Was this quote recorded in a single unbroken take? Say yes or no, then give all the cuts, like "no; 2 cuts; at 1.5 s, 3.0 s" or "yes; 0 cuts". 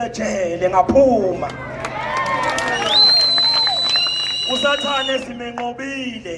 yes; 0 cuts